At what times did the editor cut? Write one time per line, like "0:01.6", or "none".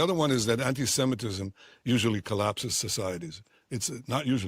none